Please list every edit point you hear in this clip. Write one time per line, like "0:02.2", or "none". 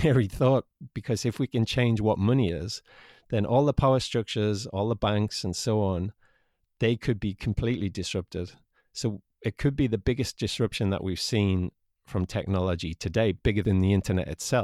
0:13.6